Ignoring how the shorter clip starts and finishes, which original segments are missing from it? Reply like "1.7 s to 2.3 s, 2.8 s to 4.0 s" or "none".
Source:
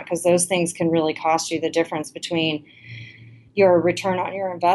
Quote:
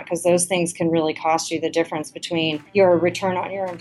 2.6 s to 3.5 s